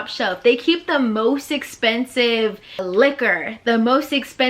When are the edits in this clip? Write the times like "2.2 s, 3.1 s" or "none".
2.8 s